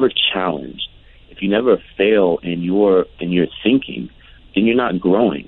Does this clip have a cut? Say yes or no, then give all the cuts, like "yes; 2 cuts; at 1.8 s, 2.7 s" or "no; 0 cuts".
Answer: yes; 1 cut; at 3.2 s